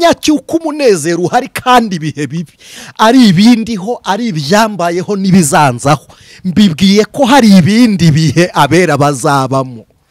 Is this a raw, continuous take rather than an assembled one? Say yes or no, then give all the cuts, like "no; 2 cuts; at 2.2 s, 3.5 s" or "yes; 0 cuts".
yes; 0 cuts